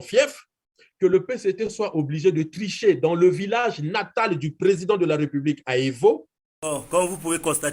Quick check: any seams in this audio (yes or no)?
yes